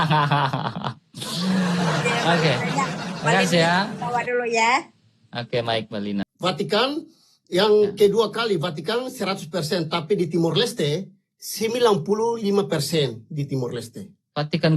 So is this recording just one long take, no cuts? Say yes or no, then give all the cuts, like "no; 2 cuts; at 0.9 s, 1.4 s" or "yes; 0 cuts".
no; 1 cut; at 6.2 s